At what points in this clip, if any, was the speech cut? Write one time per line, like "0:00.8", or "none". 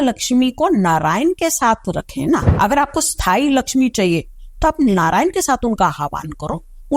0:02.5